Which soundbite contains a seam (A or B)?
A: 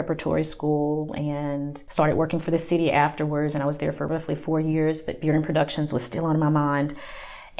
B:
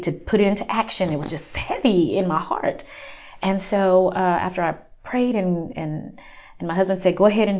A